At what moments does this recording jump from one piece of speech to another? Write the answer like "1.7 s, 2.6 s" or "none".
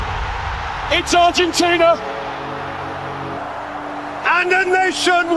3.4 s